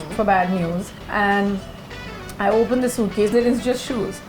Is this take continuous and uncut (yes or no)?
no